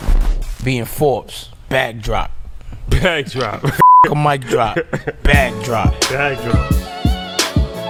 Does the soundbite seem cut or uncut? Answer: uncut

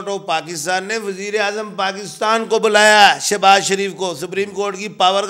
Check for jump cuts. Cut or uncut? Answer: uncut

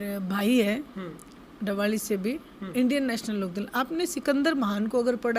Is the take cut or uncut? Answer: uncut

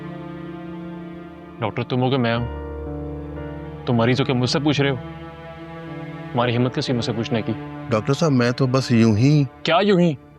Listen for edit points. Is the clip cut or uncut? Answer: uncut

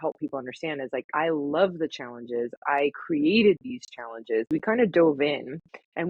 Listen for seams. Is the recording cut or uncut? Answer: cut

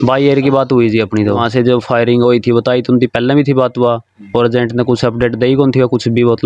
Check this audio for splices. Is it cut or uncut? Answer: cut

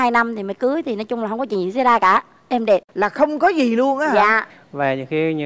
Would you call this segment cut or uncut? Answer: cut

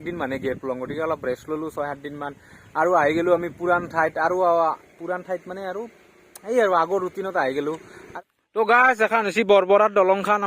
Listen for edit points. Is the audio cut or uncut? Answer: cut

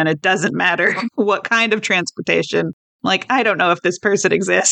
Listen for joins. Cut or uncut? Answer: cut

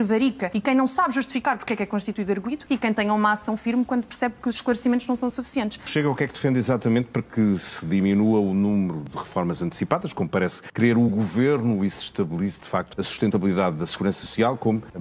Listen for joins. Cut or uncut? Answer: uncut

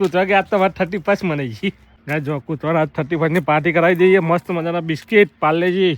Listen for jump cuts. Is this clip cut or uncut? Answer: cut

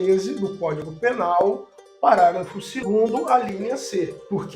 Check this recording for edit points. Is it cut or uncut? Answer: cut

